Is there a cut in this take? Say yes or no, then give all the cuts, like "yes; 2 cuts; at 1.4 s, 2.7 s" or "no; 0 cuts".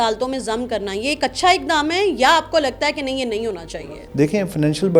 yes; 1 cut; at 3.7 s